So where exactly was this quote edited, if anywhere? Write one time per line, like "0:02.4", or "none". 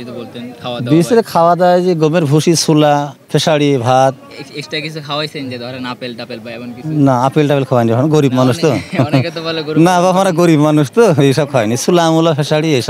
none

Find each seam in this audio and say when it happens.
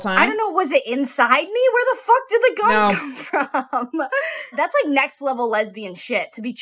0:04.6

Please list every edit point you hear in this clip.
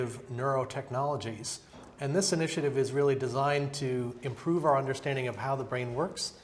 0:04.0

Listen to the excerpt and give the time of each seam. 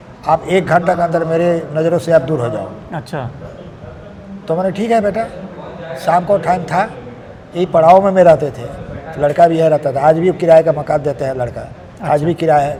none

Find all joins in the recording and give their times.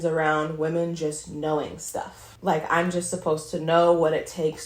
0:02.2

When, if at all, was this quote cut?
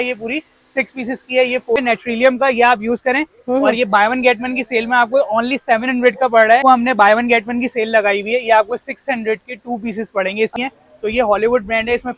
0:01.8
0:06.6
0:10.5

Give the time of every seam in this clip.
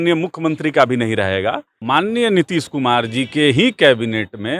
0:01.7

